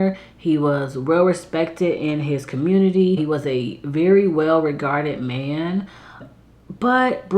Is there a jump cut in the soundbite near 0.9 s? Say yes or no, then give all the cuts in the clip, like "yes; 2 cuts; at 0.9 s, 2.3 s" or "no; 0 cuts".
no; 2 cuts; at 3.2 s, 6.3 s